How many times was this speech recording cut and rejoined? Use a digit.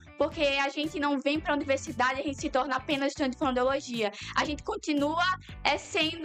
0